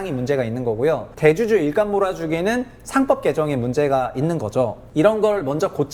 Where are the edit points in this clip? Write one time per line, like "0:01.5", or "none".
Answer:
0:01.1
0:04.8